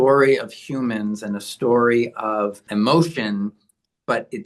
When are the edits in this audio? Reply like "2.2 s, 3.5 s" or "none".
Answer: 2.7 s